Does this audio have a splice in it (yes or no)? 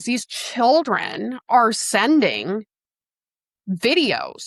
no